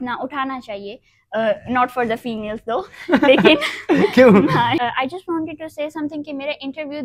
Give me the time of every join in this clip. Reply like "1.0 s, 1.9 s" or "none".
4.7 s